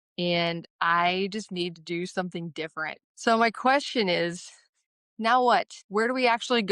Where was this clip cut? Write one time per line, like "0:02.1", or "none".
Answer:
0:03.0
0:05.8